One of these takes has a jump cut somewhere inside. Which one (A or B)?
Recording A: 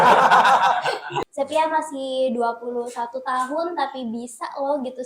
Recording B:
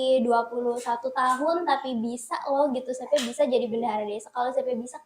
A